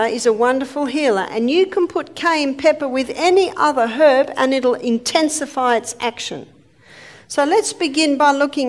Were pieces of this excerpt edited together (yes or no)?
no